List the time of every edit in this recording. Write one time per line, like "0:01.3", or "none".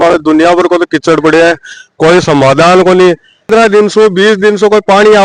0:03.5